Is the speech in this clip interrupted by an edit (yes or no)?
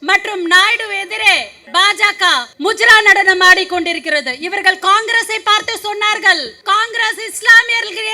yes